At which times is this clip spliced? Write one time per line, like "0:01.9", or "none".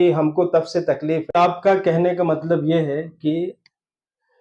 0:01.3